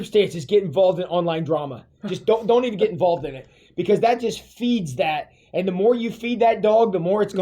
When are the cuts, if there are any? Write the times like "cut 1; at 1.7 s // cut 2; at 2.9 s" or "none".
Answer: none